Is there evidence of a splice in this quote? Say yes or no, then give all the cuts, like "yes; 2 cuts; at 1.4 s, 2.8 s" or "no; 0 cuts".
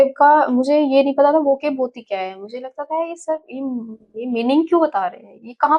no; 0 cuts